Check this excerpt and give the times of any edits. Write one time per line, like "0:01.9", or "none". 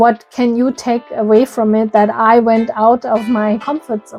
none